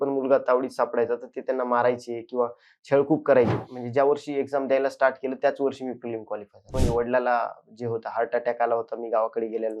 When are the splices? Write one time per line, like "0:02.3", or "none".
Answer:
0:03.6
0:06.8